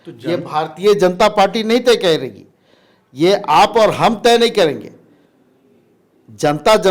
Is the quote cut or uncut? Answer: uncut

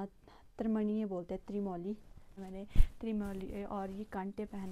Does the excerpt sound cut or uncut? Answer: cut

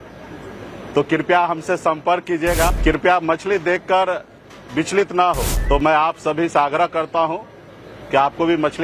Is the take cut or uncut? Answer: cut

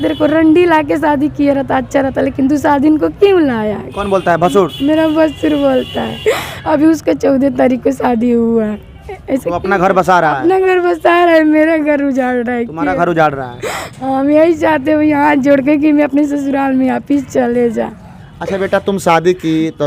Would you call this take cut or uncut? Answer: uncut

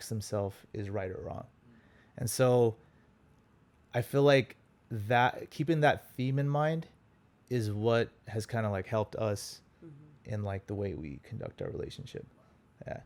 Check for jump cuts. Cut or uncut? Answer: uncut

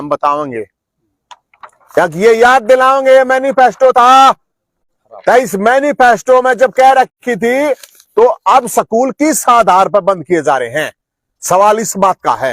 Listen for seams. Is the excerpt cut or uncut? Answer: uncut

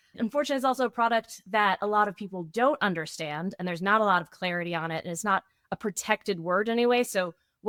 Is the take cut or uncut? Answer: uncut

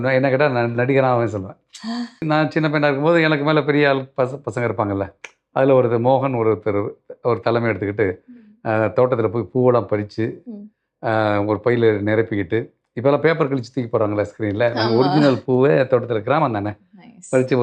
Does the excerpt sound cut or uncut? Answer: cut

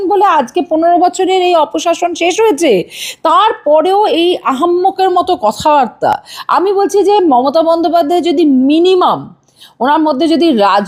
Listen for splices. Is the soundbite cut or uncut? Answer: uncut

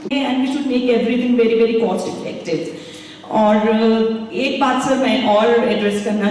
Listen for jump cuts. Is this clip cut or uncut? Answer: uncut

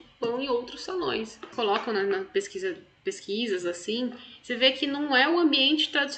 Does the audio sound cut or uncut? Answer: cut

